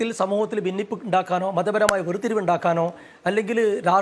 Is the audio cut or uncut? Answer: uncut